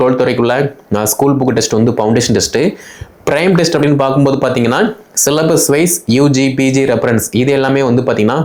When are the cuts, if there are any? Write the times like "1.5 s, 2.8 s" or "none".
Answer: none